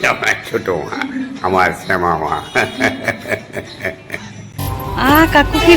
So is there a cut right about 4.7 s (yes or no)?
yes